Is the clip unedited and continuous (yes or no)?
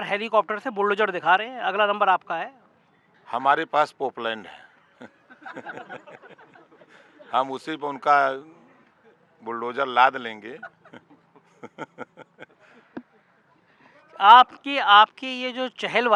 yes